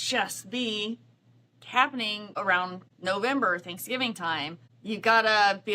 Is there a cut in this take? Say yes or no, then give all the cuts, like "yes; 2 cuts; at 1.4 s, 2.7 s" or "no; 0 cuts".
yes; 2 cuts; at 2.5 s, 4.7 s